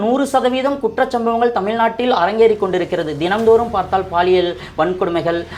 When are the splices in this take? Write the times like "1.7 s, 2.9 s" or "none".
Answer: none